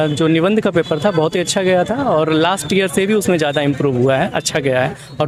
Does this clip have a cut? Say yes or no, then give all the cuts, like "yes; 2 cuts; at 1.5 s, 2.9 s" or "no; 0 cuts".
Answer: no; 0 cuts